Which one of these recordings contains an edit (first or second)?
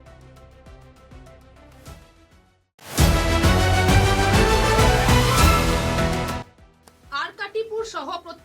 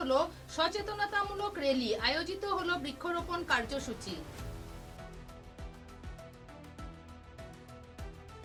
first